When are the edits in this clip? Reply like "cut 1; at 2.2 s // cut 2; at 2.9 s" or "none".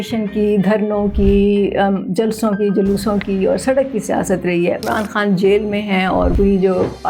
cut 1; at 4.8 s